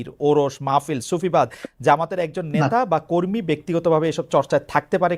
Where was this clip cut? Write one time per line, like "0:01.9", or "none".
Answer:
none